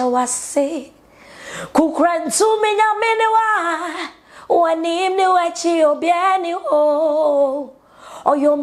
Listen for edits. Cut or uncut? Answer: uncut